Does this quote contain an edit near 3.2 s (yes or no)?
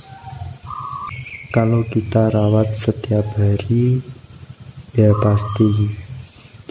no